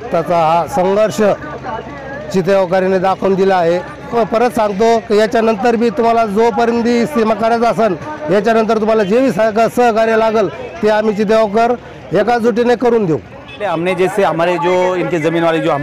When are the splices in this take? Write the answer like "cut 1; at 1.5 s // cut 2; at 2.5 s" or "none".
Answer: cut 1; at 4.1 s // cut 2; at 13.7 s

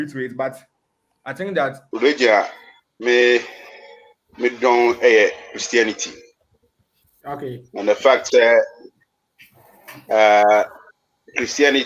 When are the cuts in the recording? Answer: cut 1; at 1.8 s

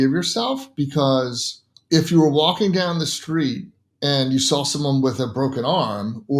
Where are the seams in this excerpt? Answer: none

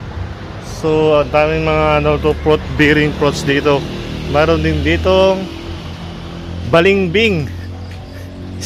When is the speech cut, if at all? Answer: none

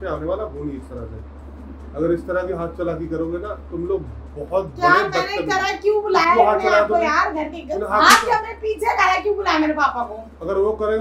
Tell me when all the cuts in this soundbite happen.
none

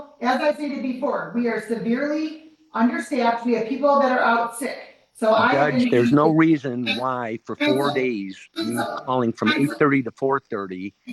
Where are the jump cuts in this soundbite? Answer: none

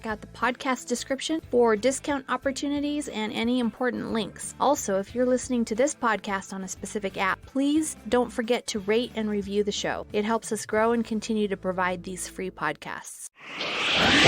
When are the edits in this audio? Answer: cut 1; at 13.2 s

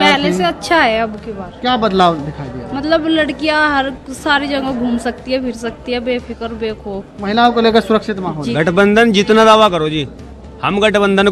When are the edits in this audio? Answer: cut 1; at 8.4 s

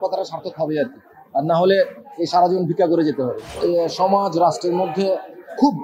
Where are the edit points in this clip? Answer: cut 1; at 3.5 s

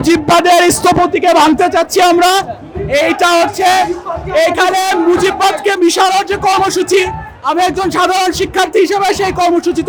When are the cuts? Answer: none

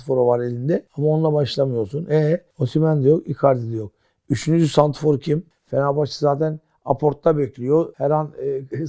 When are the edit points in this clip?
cut 1; at 5.5 s // cut 2; at 7.9 s

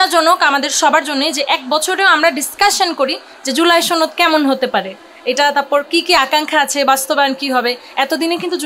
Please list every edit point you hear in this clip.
none

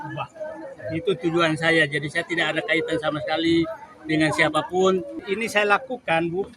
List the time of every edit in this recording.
cut 1; at 5.2 s

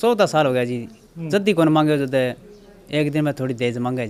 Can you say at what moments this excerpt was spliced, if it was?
none

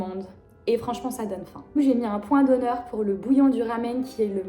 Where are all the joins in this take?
cut 1; at 1.8 s

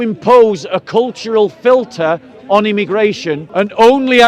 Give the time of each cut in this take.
cut 1; at 3.4 s

